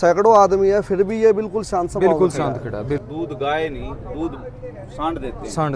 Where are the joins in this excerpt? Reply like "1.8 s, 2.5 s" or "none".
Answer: 3.1 s